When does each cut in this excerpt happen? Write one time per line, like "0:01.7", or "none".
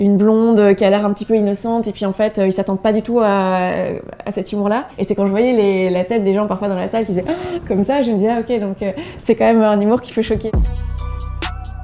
0:04.9
0:10.5

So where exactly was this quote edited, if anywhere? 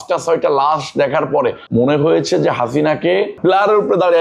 0:01.6
0:03.4

